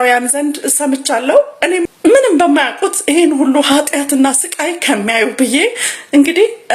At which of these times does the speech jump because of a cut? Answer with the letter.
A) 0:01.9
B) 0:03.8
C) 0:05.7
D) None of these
A